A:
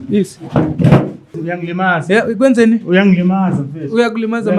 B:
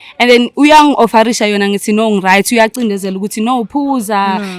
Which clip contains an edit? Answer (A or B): A